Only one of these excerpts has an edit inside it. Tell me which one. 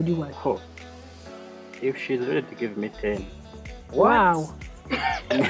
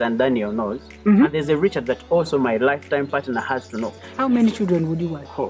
second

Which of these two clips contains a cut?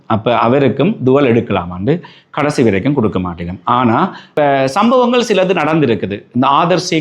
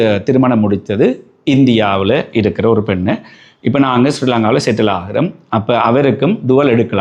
first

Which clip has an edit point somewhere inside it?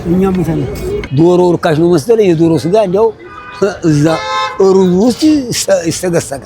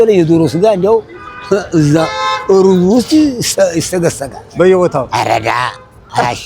first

